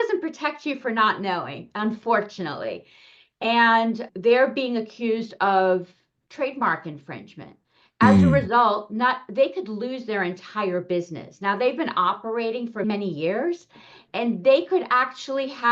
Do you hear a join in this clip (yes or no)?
yes